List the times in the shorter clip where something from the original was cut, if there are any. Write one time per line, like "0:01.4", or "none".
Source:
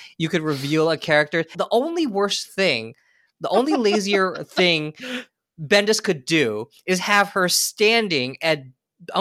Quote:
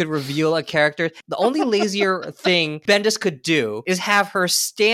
0:01.2
0:02.7
0:03.8